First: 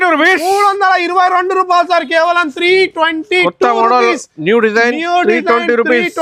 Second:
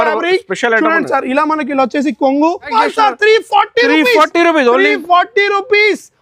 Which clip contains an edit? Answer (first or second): second